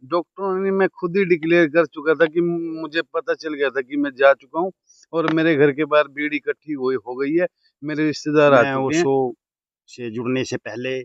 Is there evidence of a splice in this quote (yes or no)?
yes